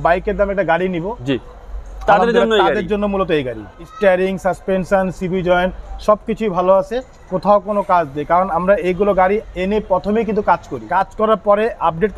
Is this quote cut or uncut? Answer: cut